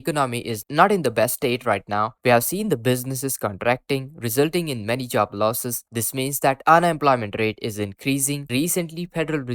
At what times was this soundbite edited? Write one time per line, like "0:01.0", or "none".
0:08.4